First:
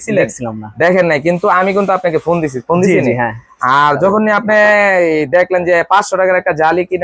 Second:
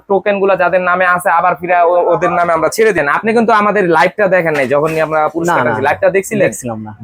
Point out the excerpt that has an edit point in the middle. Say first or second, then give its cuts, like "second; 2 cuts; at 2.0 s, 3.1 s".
second; 1 cut; at 3.0 s